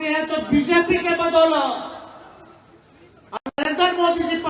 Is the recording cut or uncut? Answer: uncut